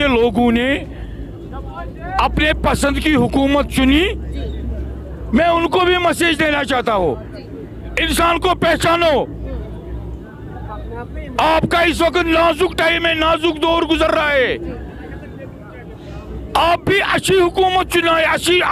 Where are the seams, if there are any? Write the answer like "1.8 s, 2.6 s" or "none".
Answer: none

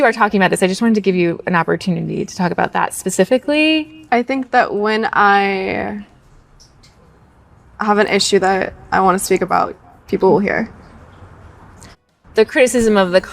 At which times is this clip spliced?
12.0 s

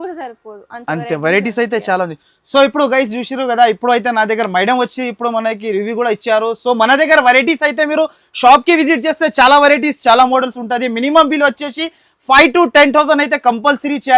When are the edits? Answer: none

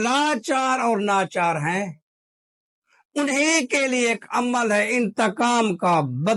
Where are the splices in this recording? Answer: none

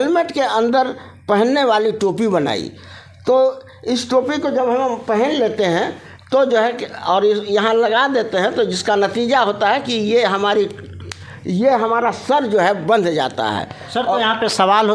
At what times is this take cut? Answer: none

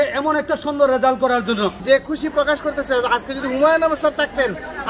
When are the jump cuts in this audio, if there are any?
1.8 s

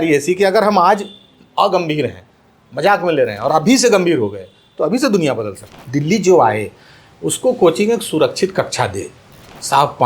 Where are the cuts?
5.8 s

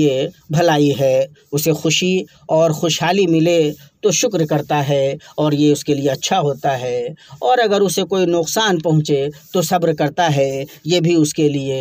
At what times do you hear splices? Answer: none

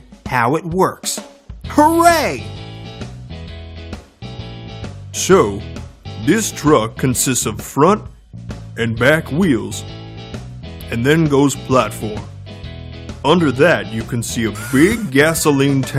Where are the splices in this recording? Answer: 6.5 s

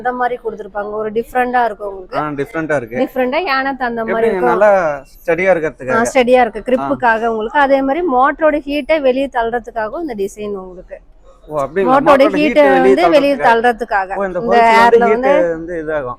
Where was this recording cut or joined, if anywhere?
none

